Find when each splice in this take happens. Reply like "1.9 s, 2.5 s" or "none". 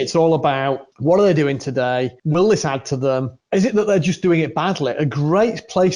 0.9 s, 2.2 s, 3.3 s